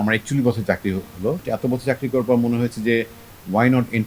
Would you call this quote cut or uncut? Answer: cut